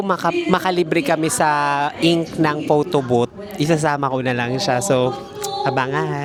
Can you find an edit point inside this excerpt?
no; 0 cuts

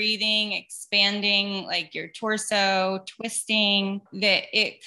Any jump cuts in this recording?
no; 0 cuts

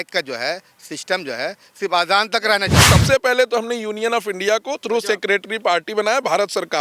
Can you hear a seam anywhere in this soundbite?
yes; 1 cut; at 2.9 s

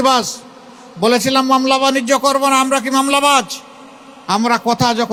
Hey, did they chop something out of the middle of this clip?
no; 0 cuts

